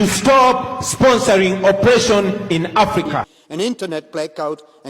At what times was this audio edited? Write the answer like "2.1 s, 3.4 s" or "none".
3.3 s